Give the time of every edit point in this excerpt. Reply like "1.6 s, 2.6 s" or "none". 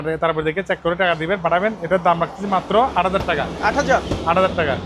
none